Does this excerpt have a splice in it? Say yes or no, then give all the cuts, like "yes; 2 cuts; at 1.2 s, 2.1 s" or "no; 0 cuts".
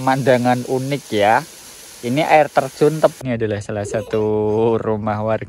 yes; 1 cut; at 3.1 s